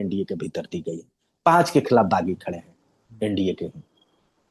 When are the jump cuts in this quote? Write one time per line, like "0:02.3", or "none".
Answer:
none